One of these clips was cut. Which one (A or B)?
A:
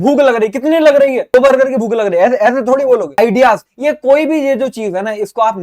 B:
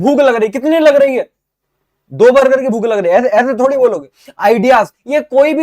A